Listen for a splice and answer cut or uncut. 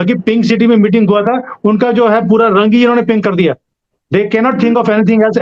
uncut